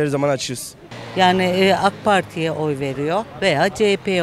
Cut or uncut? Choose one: cut